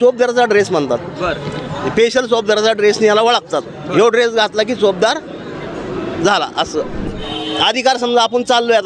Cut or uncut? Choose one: cut